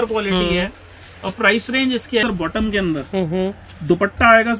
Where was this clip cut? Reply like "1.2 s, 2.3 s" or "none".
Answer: 2.2 s